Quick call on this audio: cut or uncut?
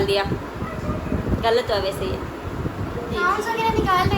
cut